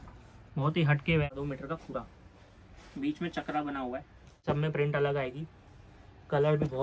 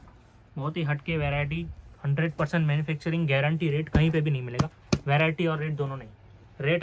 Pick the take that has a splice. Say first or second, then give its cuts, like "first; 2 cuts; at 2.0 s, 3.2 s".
first; 2 cuts; at 1.3 s, 4.4 s